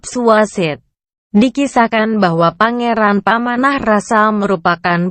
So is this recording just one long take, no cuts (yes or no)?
no